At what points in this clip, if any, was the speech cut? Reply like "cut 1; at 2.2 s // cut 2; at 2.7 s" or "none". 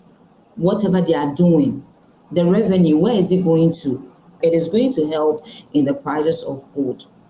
cut 1; at 4.4 s